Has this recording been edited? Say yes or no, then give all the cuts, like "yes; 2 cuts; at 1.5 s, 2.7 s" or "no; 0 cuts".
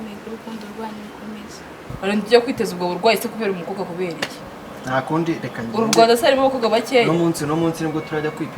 yes; 1 cut; at 1.9 s